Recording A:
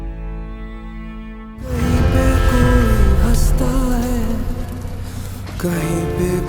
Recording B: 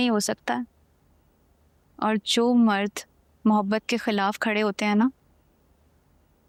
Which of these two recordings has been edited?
A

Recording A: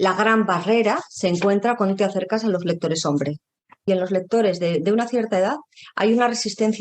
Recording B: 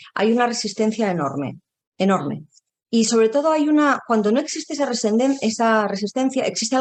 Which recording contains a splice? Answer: A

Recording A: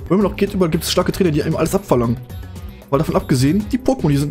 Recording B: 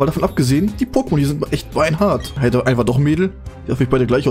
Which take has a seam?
B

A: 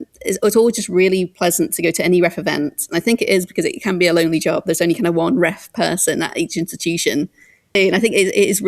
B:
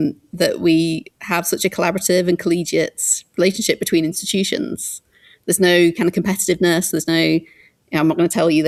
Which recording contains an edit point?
A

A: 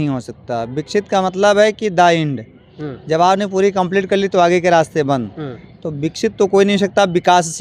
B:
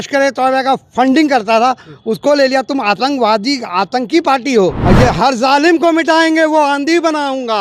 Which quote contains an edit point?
B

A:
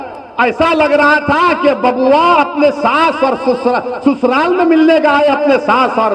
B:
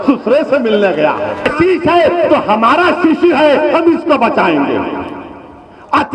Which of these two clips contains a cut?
B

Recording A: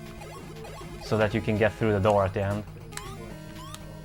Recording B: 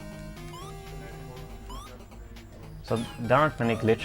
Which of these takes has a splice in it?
B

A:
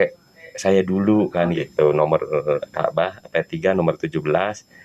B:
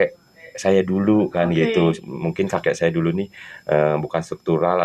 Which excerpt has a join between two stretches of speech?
A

